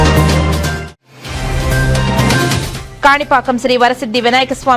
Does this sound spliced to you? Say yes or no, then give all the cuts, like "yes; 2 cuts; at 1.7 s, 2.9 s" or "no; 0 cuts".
yes; 2 cuts; at 0.9 s, 2.8 s